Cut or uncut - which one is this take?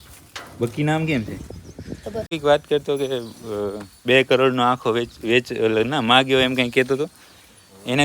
cut